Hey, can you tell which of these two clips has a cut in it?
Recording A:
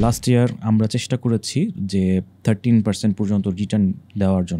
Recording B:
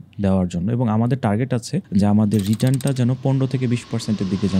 B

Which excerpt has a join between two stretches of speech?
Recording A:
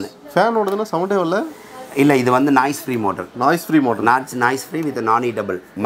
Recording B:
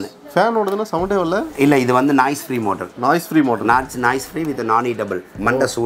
B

